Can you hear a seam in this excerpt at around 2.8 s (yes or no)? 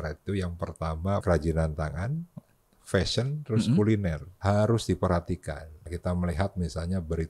no